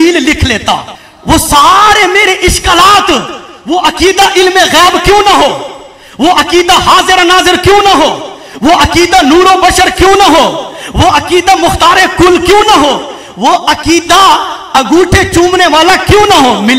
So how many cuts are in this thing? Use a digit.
1